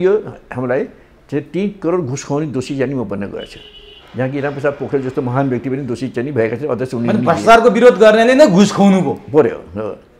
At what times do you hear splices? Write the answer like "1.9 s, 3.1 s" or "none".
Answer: none